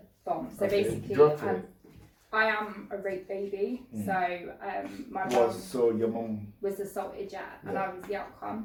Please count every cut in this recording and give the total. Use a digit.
0